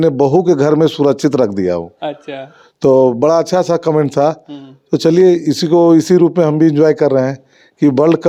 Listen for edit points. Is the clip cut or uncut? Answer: uncut